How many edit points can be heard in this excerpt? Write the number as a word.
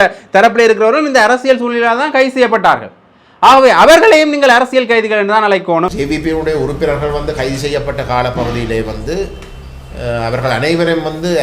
one